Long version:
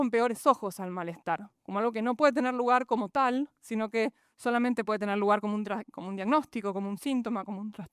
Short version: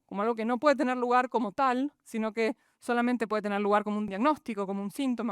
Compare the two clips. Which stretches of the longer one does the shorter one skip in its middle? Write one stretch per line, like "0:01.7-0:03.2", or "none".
0:05.7-0:06.2